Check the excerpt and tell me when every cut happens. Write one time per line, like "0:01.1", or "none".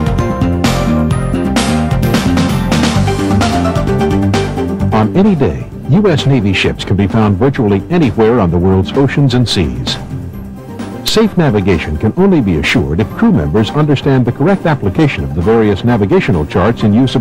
0:09.8

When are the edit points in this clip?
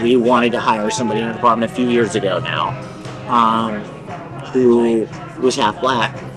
none

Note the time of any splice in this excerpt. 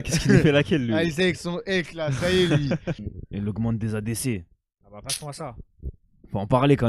0:03.1

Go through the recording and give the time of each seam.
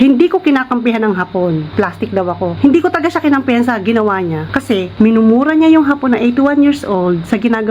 0:02.1
0:04.7

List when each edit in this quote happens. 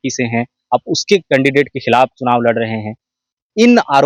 none

